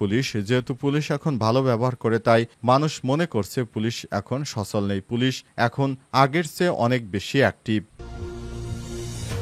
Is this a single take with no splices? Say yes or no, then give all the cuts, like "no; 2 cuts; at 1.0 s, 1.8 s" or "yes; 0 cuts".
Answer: no; 1 cut; at 8.0 s